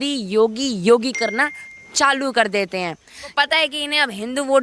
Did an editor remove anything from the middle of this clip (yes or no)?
yes